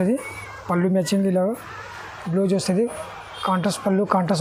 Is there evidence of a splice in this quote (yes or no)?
no